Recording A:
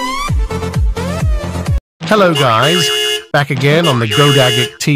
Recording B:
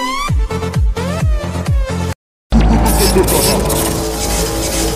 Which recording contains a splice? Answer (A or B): B